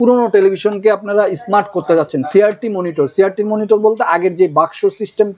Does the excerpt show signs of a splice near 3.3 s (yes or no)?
no